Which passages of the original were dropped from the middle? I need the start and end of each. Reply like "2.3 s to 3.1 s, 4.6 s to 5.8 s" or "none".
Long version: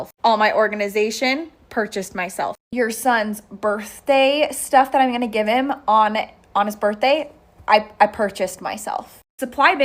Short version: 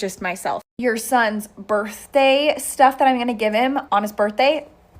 5.8 s to 6.5 s